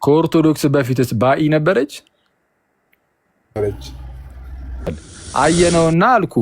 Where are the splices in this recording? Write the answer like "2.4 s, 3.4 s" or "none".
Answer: 5.0 s